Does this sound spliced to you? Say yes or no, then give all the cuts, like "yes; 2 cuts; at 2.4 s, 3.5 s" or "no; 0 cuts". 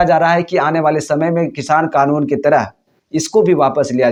no; 0 cuts